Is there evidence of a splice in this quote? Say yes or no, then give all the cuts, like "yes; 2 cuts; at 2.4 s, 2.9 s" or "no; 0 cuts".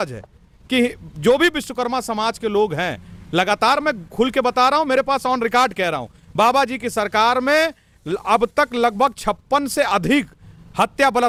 no; 0 cuts